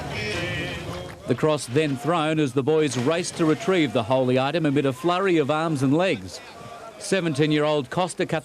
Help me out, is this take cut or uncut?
uncut